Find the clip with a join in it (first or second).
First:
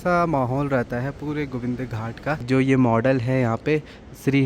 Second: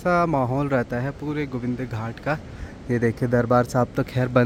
first